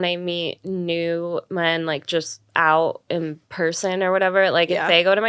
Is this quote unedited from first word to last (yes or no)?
yes